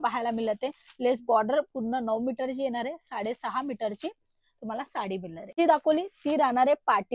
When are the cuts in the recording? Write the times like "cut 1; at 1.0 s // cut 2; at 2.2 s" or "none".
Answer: cut 1; at 5.6 s